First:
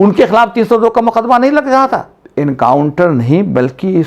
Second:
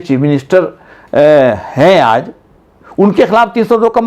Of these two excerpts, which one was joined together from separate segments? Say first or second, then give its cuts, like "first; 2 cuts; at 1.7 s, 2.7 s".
first; 1 cut; at 2.2 s